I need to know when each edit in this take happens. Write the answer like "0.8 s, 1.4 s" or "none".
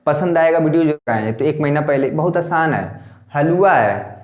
1.0 s